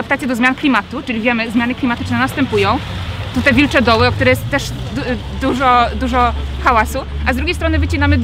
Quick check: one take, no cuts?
yes; 0 cuts

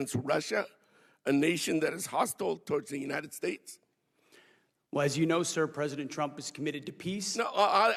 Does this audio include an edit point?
no; 0 cuts

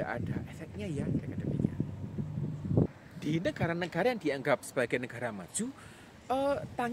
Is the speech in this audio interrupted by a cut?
no; 0 cuts

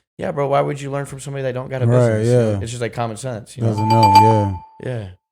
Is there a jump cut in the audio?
no; 0 cuts

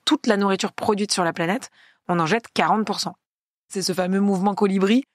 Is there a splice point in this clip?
yes; 1 cut; at 3.8 s

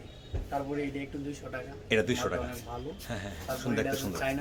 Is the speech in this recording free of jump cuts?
yes; 0 cuts

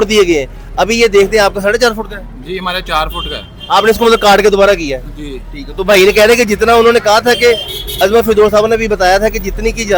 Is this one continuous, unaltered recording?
yes; 0 cuts

